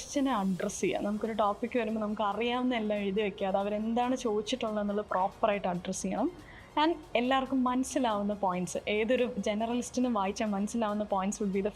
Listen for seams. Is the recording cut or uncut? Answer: uncut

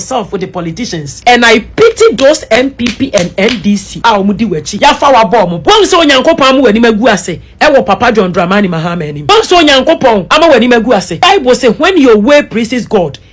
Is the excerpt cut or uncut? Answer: uncut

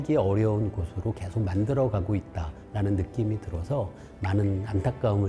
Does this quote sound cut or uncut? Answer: uncut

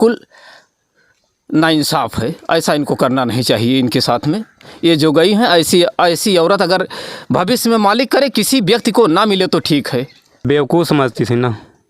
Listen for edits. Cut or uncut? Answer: cut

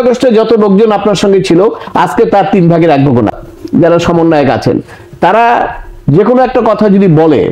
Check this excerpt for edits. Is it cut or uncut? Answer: cut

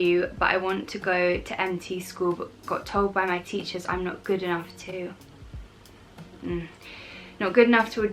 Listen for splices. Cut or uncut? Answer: uncut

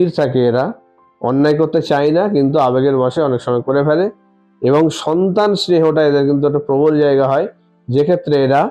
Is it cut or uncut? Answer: uncut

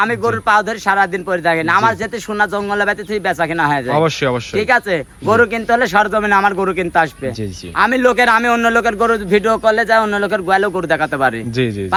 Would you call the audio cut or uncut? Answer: uncut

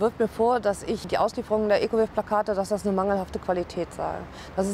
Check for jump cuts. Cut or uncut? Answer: cut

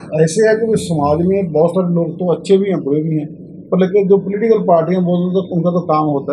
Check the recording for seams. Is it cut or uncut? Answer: uncut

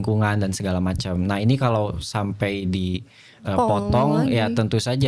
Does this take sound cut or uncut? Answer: uncut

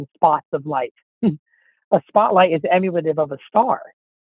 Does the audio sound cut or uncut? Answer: uncut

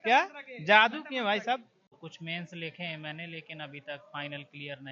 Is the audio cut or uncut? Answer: cut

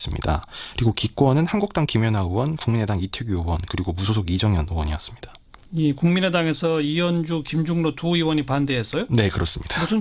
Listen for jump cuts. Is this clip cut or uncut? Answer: cut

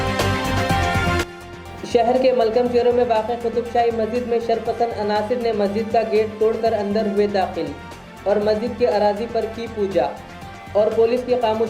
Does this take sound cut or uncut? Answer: cut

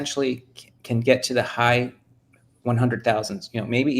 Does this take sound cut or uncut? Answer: uncut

